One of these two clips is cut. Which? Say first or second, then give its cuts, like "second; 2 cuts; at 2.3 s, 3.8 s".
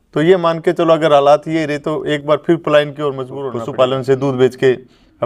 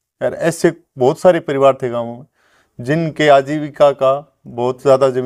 first; 1 cut; at 3.6 s